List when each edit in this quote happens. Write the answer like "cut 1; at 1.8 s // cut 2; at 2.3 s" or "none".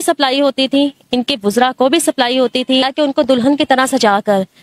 cut 1; at 2.9 s